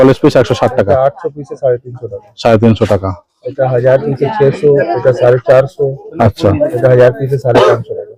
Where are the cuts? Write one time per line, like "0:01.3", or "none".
none